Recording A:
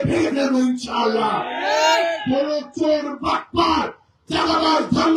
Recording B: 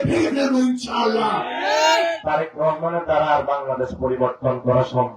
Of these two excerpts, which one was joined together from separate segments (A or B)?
B